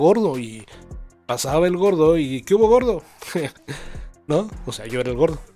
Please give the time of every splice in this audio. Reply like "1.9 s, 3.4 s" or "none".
none